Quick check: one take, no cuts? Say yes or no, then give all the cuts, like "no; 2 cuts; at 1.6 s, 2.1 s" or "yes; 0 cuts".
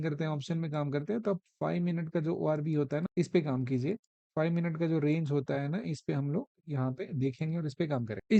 yes; 0 cuts